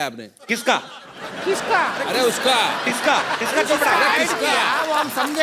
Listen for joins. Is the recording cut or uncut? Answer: uncut